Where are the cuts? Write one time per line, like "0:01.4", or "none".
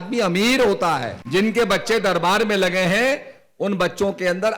0:01.1